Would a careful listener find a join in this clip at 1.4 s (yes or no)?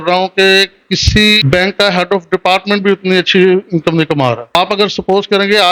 yes